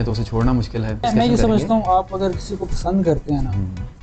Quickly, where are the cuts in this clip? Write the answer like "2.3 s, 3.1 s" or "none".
1.0 s